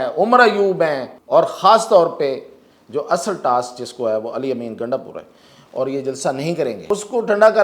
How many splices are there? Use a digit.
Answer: 2